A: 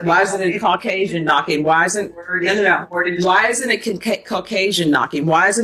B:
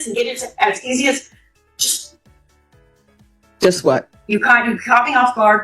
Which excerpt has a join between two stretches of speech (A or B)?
B